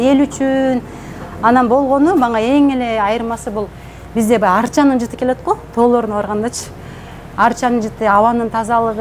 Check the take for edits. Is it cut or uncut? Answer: uncut